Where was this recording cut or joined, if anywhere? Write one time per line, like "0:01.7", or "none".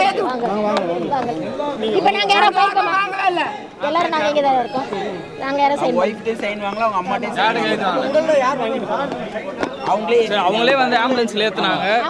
none